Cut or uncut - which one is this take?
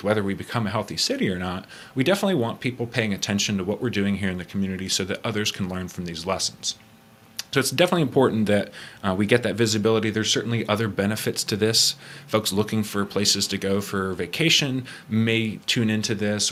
uncut